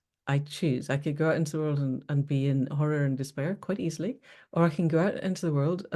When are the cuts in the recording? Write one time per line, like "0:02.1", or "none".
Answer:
none